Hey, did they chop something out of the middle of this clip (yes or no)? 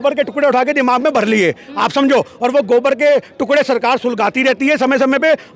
no